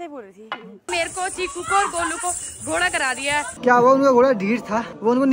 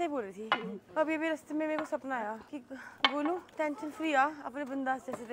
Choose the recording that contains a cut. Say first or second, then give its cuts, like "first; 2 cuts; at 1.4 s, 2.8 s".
first; 2 cuts; at 0.9 s, 3.5 s